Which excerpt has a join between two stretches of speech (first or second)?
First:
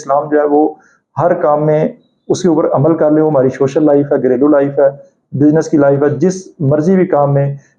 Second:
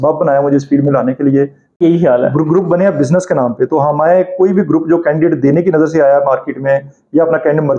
second